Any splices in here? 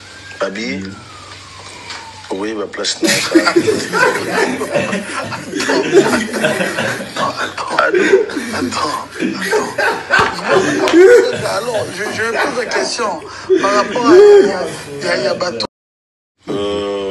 yes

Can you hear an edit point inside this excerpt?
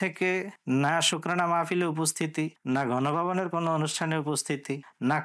no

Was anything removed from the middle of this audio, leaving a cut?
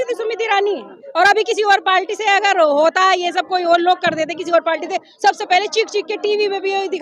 no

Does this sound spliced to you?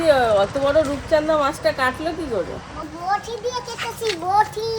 yes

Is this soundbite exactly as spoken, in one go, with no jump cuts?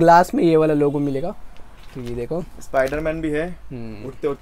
yes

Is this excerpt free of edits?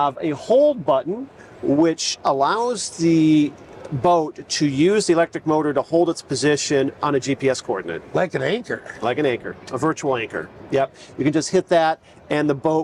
yes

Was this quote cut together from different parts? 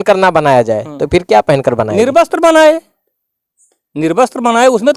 no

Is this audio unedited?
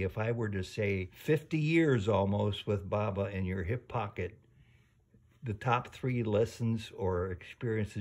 no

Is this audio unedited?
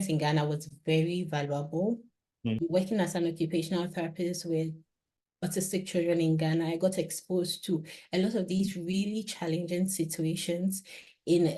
no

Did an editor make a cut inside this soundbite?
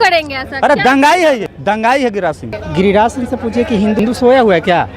yes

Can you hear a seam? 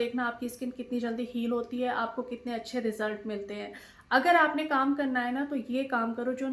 no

